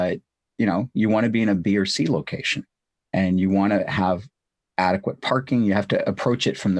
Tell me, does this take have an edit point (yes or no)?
no